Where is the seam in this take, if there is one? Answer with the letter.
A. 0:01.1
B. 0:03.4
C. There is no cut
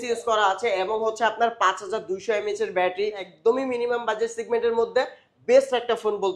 B